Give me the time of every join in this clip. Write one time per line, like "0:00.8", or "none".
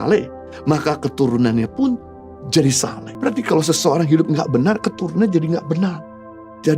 0:03.0

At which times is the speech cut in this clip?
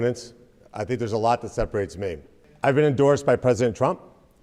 0:02.4

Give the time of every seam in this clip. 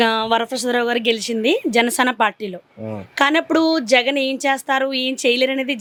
none

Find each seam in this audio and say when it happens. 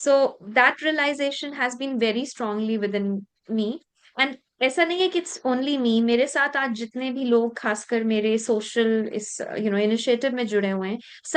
none

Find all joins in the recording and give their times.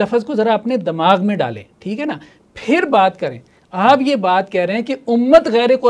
none

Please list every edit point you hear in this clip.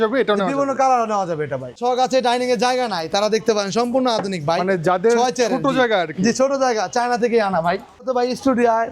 0:01.8
0:08.1

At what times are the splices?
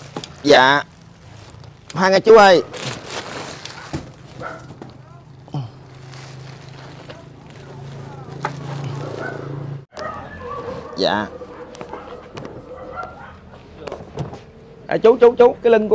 0:10.0

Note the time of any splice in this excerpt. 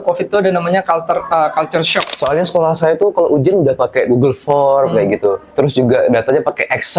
0:02.0

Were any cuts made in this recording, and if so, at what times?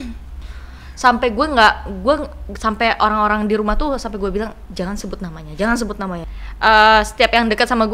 0:06.2

